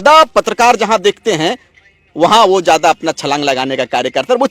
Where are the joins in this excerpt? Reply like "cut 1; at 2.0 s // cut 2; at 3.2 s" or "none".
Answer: none